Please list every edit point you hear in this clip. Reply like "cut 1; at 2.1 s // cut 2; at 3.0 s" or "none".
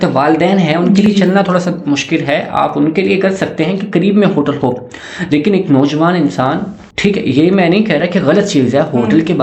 none